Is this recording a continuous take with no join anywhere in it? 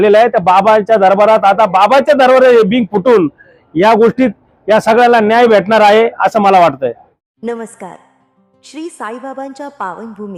yes; 0 cuts

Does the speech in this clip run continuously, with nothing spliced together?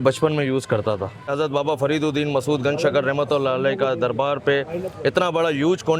no; 1 cut; at 1.2 s

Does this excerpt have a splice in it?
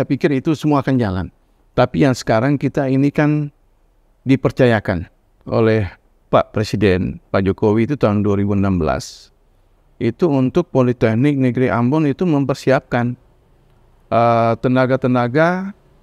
no; 0 cuts

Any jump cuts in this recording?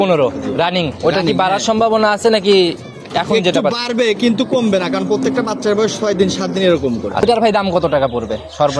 yes; 1 cut; at 7.2 s

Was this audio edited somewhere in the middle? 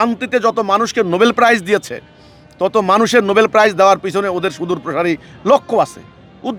no; 0 cuts

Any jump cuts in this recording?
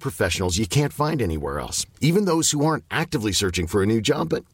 no; 0 cuts

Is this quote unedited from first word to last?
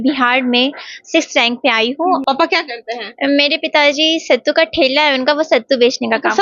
no; 1 cut; at 2.2 s

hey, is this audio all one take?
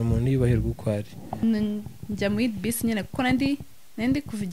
no; 1 cut; at 1.4 s

